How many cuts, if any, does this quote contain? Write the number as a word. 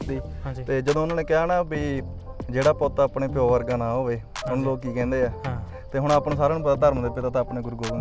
zero